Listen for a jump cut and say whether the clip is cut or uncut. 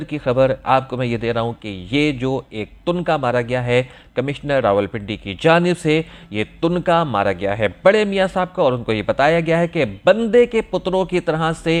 uncut